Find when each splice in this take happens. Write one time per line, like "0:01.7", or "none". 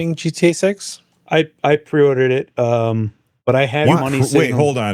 none